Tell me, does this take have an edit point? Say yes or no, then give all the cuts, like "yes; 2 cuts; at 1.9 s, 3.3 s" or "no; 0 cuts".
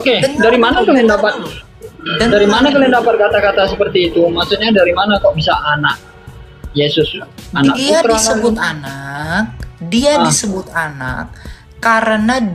no; 0 cuts